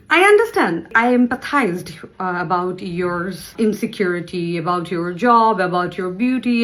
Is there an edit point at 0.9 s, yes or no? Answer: yes